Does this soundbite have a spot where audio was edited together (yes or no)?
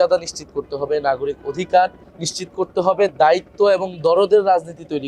no